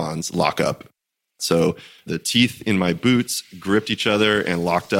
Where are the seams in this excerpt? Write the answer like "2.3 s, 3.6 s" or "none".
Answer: 1.2 s, 2.0 s